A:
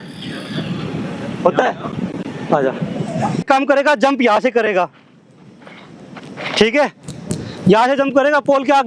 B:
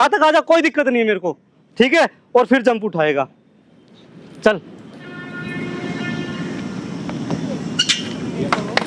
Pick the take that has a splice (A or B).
A